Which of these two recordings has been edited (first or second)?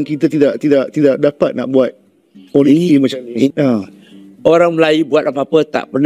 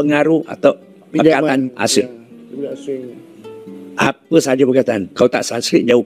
first